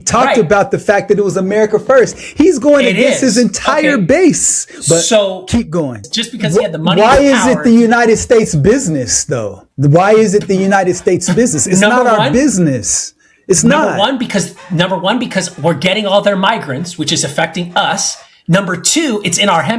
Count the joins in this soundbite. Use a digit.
1